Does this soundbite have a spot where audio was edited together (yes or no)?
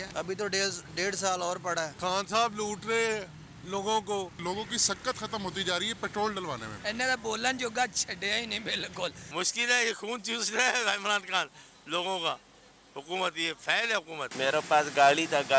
no